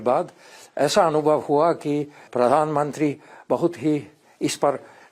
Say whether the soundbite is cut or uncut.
cut